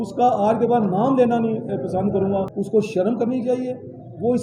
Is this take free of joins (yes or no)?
no